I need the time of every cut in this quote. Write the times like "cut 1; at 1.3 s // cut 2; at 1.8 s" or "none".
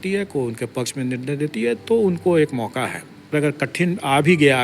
cut 1; at 3.3 s

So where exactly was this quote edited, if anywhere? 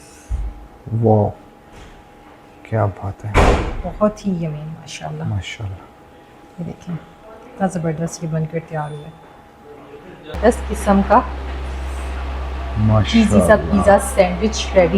cut 1; at 10.4 s

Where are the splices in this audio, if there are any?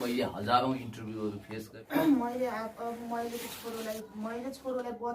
cut 1; at 1.8 s

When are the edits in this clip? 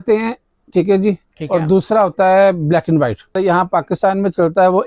cut 1; at 3.4 s

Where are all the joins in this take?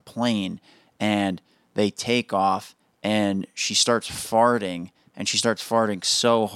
none

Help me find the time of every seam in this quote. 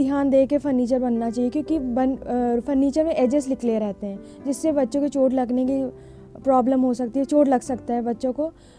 none

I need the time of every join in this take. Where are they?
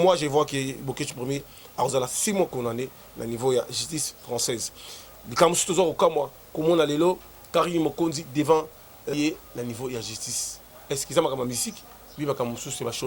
cut 1; at 9.1 s

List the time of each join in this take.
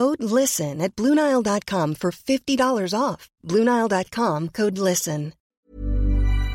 cut 1; at 5.6 s

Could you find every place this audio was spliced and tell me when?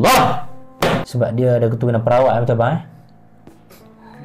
cut 1; at 1.1 s

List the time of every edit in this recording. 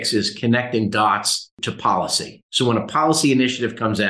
cut 1; at 1.7 s

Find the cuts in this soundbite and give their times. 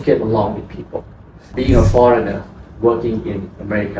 cut 1; at 1.5 s

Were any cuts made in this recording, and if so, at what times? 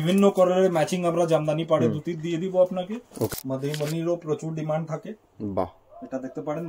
cut 1; at 3.3 s

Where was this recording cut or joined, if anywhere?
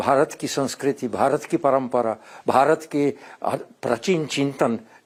none

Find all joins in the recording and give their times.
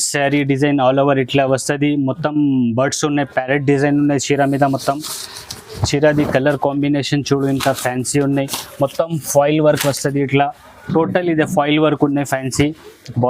none

